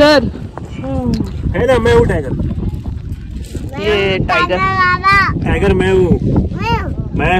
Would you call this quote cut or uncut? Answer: uncut